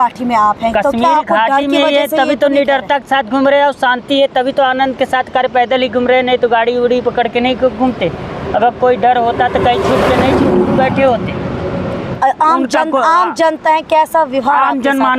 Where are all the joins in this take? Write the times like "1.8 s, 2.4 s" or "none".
12.0 s